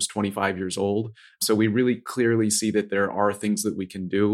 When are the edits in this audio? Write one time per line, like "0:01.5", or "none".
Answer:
none